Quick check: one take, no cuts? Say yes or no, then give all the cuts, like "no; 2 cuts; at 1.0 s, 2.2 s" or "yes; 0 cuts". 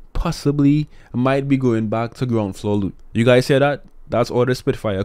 no; 1 cut; at 3.0 s